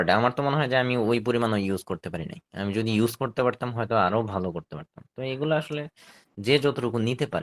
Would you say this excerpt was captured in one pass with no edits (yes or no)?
yes